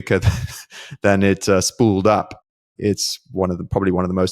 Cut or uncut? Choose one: uncut